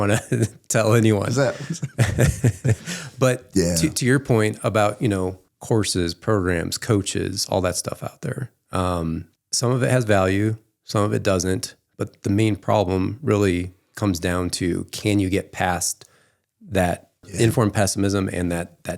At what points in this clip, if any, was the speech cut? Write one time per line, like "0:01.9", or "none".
0:05.5
0:09.4
0:17.3